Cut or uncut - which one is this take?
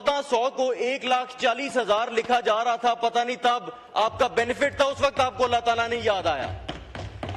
uncut